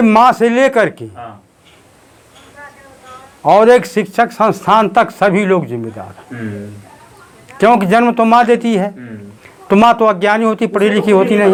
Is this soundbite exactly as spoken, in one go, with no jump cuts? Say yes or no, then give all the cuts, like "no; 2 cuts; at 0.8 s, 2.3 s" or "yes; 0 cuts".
yes; 0 cuts